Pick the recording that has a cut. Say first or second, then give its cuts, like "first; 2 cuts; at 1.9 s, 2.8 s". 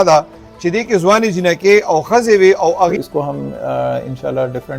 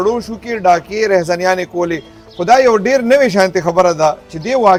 first; 1 cut; at 3.0 s